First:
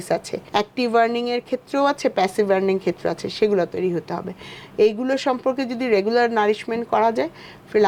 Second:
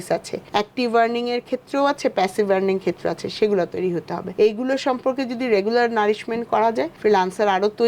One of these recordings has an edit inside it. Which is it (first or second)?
second